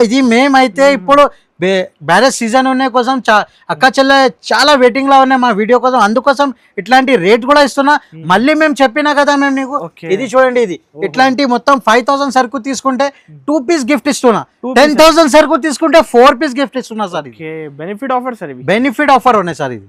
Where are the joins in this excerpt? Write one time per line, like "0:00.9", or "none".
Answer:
none